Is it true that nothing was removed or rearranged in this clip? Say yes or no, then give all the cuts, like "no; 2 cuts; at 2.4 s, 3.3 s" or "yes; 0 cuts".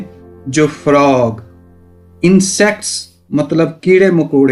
yes; 0 cuts